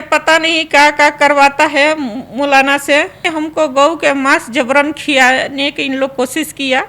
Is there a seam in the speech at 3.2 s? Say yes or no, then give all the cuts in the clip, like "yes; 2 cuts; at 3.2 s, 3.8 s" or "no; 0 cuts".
yes; 1 cut; at 3.2 s